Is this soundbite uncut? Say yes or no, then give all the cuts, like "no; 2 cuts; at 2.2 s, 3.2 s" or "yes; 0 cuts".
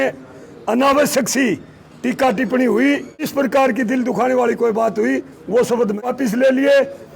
no; 2 cuts; at 3.3 s, 6.0 s